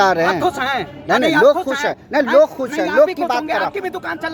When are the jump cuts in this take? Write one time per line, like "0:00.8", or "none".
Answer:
none